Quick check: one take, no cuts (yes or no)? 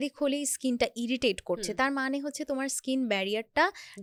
yes